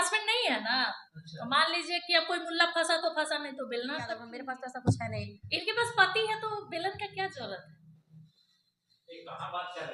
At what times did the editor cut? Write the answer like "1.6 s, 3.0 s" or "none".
4.3 s